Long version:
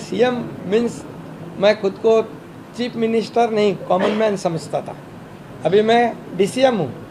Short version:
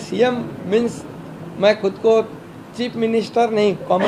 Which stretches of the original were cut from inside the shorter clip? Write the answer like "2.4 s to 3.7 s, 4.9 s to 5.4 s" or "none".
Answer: none